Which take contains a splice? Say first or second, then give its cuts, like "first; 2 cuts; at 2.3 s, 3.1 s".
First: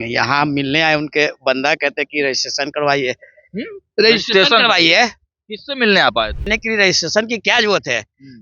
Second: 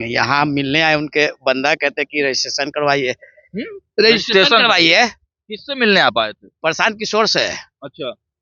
first; 1 cut; at 6.5 s